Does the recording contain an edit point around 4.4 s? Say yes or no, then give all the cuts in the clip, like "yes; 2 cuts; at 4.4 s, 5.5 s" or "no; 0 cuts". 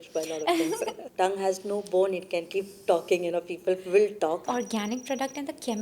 yes; 2 cuts; at 1.0 s, 4.4 s